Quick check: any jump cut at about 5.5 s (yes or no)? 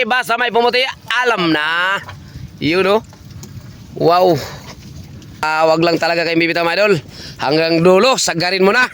yes